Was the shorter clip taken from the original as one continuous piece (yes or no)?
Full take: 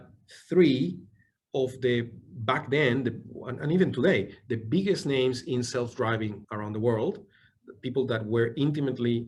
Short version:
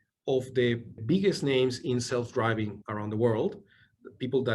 no